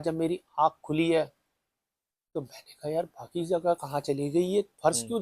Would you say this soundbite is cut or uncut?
uncut